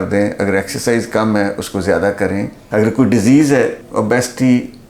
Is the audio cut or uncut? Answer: cut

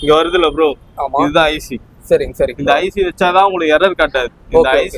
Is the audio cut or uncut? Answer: uncut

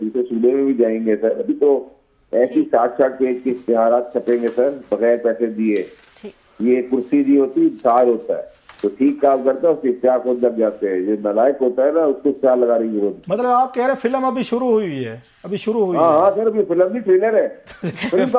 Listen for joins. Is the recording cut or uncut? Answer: uncut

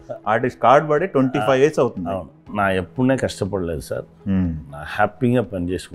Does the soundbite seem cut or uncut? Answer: cut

